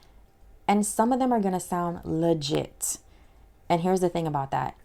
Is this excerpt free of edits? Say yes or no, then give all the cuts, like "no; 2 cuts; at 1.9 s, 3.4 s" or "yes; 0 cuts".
yes; 0 cuts